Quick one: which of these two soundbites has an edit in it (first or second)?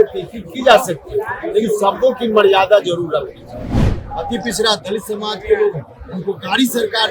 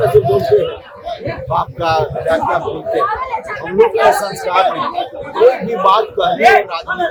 first